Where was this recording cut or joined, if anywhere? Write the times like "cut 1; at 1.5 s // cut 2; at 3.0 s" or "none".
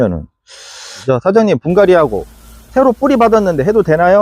cut 1; at 1.0 s